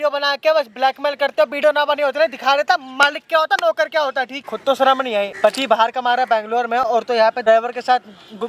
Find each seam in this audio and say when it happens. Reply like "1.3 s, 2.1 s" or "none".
4.4 s, 5.3 s, 7.4 s